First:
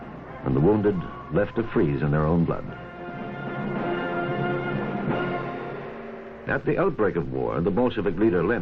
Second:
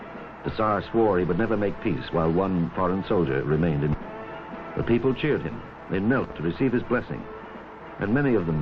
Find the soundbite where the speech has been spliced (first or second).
first